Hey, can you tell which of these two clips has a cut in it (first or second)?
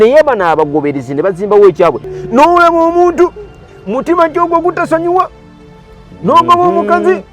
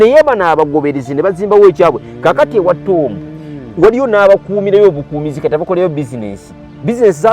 first